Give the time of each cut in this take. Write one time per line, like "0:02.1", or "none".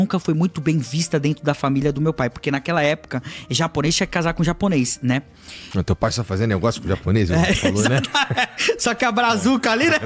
none